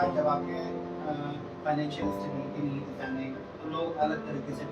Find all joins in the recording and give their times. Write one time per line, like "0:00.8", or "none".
0:03.5